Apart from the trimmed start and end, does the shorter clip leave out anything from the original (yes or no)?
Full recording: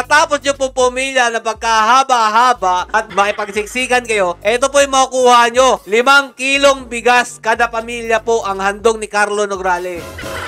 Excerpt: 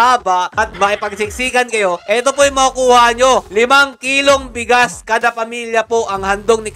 no